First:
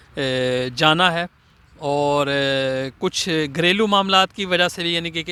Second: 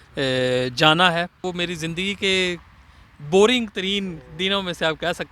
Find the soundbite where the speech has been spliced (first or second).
second